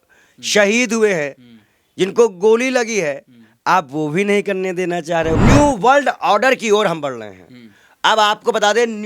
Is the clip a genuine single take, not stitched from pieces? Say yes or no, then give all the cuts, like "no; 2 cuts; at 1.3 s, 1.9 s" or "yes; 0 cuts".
no; 1 cut; at 5.4 s